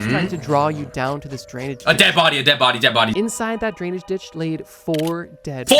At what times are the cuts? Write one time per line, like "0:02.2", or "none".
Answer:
0:03.1